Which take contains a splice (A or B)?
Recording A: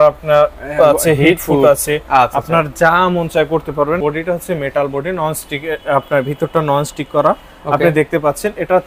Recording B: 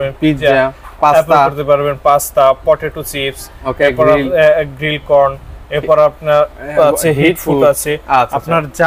A